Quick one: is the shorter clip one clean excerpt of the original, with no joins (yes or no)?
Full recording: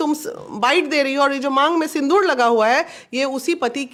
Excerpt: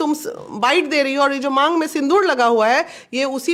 yes